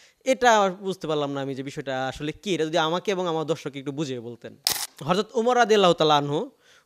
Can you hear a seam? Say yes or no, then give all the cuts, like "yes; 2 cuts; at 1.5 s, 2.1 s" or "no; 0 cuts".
yes; 1 cut; at 4.7 s